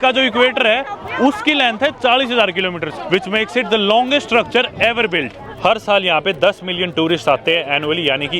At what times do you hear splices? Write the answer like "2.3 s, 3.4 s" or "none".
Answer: 3.0 s, 5.4 s